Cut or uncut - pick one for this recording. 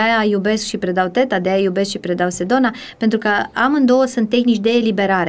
uncut